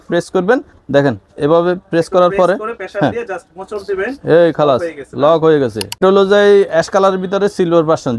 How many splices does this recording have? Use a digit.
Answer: 1